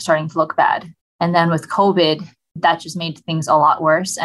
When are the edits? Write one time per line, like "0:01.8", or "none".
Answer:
0:02.5